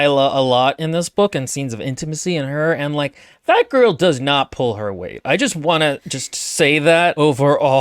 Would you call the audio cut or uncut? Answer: uncut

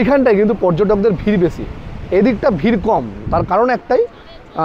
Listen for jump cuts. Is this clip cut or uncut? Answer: uncut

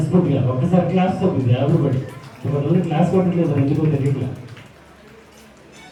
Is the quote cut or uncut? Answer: uncut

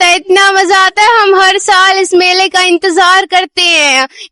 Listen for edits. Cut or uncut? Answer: uncut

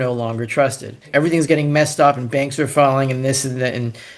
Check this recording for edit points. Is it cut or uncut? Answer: cut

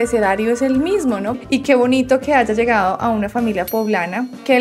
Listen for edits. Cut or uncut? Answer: cut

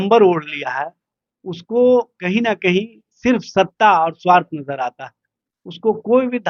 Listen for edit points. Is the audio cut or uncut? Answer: uncut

